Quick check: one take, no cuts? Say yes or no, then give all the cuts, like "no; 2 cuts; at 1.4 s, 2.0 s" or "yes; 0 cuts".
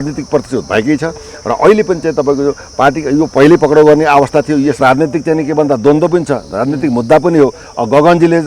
no; 1 cut; at 4.8 s